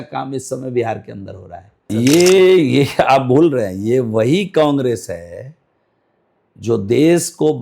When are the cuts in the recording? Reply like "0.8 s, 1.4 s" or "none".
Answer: 1.9 s